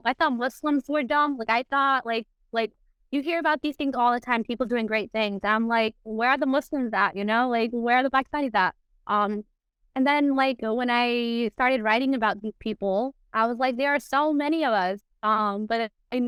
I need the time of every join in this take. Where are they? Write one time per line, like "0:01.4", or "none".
none